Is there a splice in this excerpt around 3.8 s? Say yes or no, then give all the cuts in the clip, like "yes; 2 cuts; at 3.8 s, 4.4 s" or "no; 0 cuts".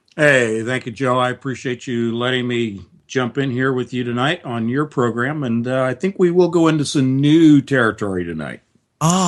no; 1 cut; at 6.8 s